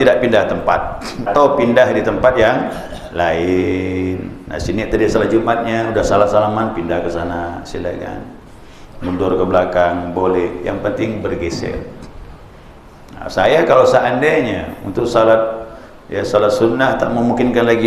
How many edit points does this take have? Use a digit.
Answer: 1